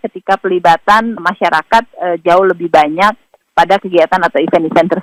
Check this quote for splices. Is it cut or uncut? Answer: uncut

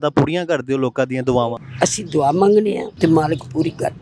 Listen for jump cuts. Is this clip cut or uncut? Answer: cut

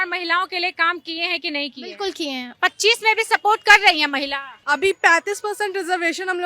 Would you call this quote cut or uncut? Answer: cut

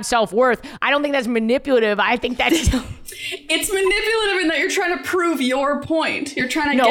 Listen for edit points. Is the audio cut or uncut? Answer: uncut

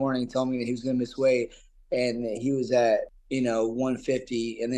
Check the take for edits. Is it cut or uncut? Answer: cut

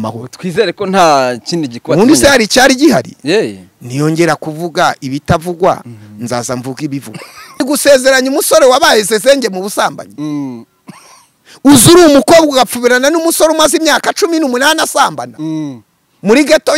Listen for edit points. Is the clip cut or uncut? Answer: cut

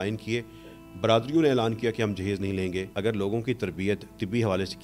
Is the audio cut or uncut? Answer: cut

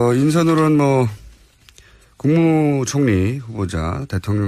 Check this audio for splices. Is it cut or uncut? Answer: uncut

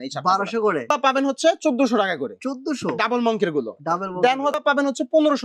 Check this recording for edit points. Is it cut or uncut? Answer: cut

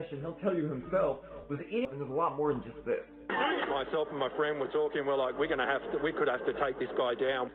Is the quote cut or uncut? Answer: cut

